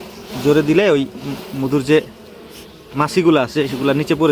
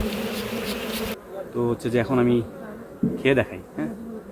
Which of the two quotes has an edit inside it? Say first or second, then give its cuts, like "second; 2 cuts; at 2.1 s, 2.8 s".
second; 1 cut; at 1.1 s